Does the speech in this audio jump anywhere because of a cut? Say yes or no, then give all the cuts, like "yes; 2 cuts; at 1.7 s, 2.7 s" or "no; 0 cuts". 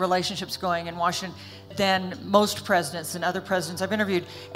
yes; 1 cut; at 1.7 s